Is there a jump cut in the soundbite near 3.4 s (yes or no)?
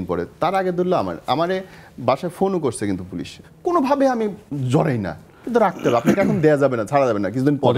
yes